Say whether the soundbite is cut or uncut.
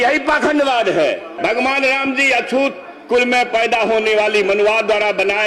cut